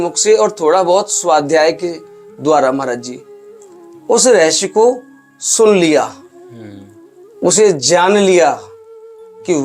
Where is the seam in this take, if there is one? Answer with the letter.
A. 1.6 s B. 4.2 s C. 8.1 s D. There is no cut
D